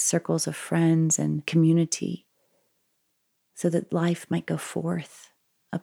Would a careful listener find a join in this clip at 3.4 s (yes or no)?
no